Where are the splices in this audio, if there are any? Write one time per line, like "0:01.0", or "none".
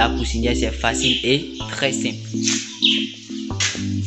none